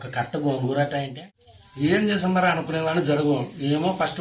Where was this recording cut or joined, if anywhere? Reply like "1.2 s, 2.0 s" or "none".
1.1 s